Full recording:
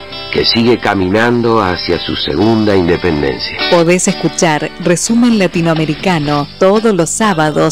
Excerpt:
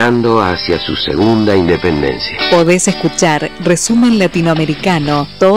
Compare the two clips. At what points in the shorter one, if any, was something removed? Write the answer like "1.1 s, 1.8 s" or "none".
none